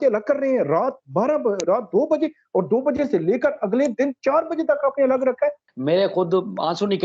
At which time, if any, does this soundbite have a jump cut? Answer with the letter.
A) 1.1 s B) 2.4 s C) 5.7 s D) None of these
C